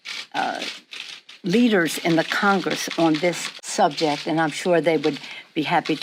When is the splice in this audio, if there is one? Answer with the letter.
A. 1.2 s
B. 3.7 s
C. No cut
C